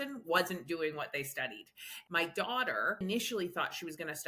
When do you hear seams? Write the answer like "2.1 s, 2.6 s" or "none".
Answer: 1.9 s, 3.0 s